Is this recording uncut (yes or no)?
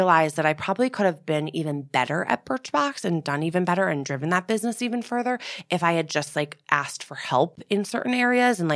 yes